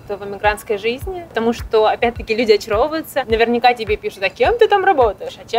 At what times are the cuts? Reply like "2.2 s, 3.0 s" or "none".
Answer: 1.3 s, 3.2 s